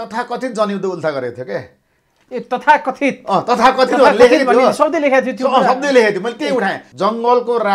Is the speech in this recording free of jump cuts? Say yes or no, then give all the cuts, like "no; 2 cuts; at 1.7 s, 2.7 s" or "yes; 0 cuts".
no; 1 cut; at 6.8 s